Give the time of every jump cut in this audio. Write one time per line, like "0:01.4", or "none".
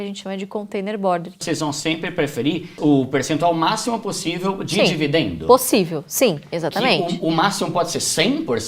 0:01.4
0:02.7